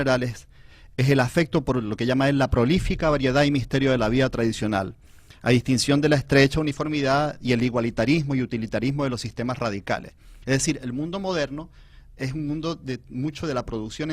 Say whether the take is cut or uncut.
cut